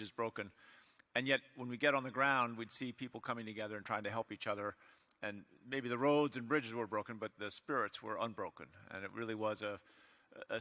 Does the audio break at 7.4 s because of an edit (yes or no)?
no